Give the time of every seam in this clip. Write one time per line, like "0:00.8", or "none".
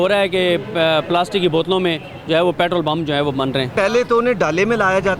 0:03.7